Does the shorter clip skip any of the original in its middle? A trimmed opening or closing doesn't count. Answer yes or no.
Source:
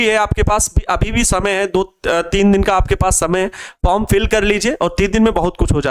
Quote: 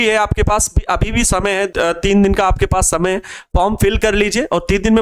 yes